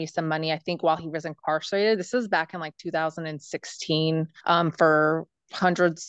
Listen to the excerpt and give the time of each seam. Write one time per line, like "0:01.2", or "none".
0:04.3